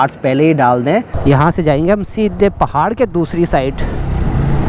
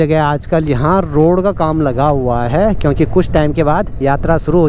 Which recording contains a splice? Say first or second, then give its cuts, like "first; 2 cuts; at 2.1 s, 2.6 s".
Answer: first; 1 cut; at 1.1 s